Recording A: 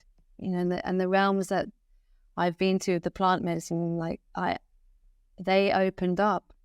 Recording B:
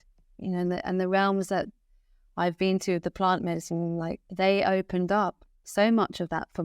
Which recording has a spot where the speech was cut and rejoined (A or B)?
B